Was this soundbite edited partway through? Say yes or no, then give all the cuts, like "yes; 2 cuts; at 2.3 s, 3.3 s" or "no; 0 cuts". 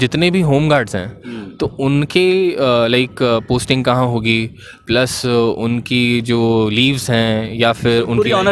no; 0 cuts